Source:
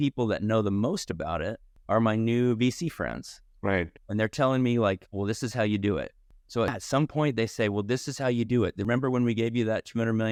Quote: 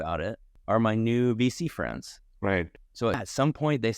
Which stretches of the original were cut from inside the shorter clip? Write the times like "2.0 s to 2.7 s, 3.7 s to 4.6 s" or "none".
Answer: 4.0 s to 6.3 s